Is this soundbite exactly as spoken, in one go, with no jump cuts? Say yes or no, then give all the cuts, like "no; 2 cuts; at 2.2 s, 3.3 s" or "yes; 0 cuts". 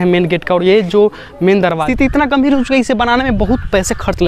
no; 1 cut; at 1.8 s